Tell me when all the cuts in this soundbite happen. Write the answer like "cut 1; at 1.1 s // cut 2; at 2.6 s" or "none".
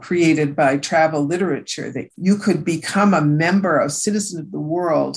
none